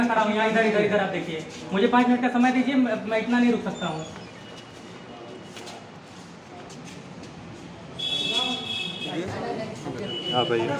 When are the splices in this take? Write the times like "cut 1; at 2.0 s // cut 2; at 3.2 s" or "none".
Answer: cut 1; at 9.1 s